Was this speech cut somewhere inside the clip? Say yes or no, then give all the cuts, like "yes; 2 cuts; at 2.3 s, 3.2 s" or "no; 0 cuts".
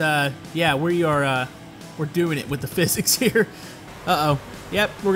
yes; 1 cut; at 3.9 s